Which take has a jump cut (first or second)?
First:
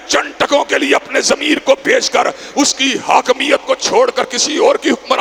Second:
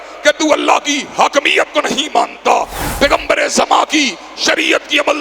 second